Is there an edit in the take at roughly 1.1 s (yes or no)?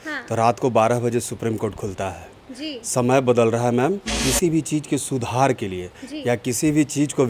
no